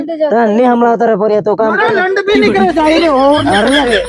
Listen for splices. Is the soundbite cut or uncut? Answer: uncut